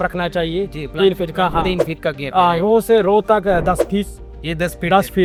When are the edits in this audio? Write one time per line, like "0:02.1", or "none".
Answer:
none